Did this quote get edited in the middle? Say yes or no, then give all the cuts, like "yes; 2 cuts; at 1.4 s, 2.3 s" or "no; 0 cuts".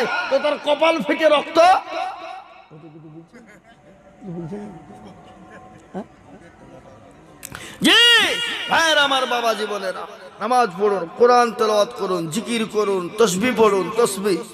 no; 0 cuts